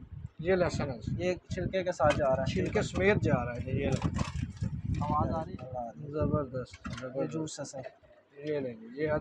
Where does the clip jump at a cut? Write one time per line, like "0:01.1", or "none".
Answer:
0:05.5